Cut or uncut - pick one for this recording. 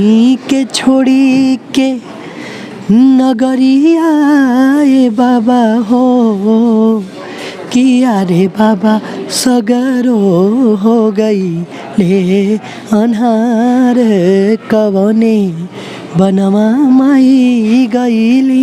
uncut